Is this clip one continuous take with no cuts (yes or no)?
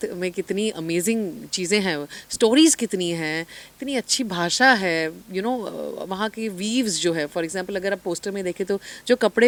yes